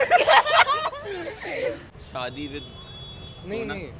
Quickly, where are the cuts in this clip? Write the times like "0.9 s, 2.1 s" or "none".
1.8 s